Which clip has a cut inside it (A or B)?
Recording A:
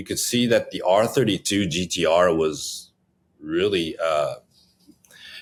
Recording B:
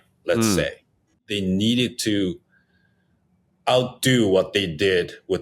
B